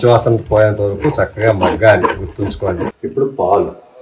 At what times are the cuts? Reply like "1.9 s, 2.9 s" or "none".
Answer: 3.0 s